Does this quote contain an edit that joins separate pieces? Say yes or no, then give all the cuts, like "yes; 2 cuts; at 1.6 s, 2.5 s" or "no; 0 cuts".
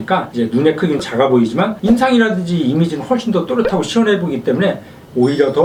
no; 0 cuts